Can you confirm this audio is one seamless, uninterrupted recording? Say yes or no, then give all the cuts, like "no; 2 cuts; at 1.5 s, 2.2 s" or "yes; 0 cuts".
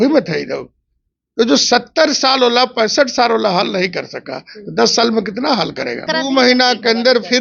no; 1 cut; at 6.1 s